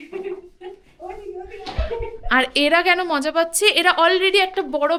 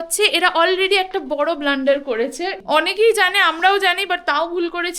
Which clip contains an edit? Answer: second; 1 cut; at 2.6 s

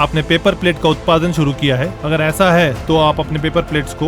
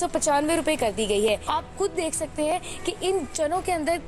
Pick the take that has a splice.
second; 1 cut; at 1.4 s

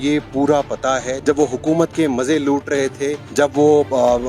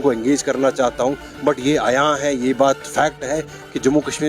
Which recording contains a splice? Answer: first; 2 cuts; at 1.1 s, 3.2 s

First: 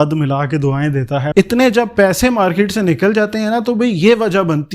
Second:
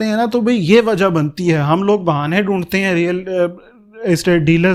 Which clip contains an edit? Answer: first; 1 cut; at 1.3 s

